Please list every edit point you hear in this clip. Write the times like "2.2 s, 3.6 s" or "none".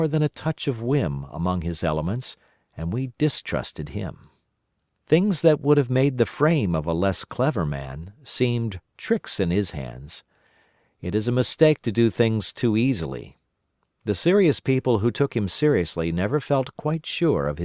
16.0 s